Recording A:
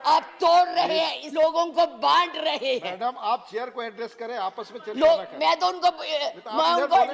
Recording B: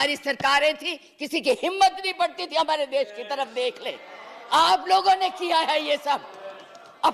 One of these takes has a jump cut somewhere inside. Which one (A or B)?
A